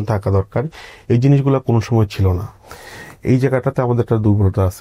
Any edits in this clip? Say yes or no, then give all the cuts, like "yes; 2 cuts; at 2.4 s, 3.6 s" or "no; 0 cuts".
no; 0 cuts